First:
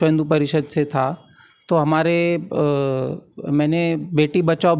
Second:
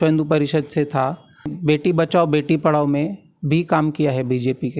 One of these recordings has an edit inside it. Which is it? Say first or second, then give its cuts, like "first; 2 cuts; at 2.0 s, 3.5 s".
second; 1 cut; at 1.5 s